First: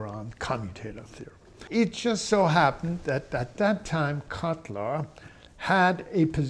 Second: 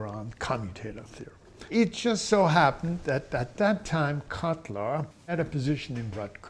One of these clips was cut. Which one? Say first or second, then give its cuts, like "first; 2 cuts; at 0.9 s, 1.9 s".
second; 1 cut; at 5.3 s